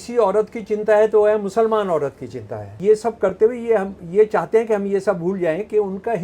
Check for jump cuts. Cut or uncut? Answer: cut